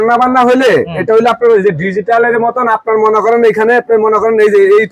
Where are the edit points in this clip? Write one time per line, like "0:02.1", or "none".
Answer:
none